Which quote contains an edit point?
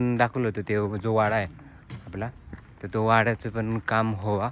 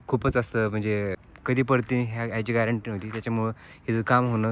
second; 1 cut; at 1.2 s

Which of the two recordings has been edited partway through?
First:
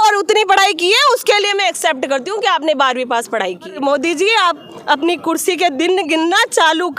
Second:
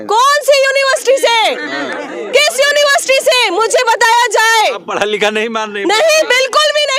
first; 1 cut; at 3.8 s

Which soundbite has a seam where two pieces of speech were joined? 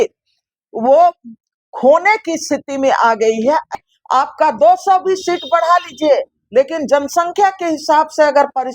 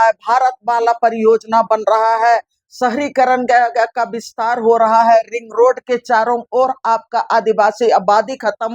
first; 1 cut; at 3.7 s

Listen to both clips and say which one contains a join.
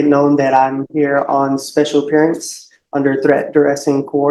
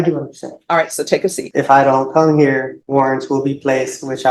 second; 2 cuts; at 1.4 s, 2.8 s

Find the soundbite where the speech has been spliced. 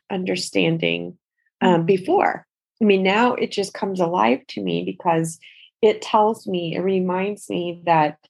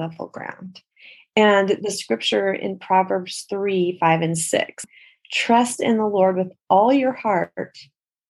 second; 1 cut; at 4.8 s

